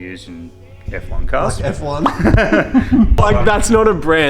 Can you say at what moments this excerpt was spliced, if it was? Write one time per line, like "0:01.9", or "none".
0:03.2